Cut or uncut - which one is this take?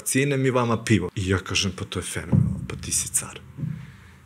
cut